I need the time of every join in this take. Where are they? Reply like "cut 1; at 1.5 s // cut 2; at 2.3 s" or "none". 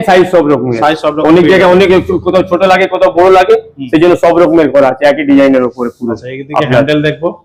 none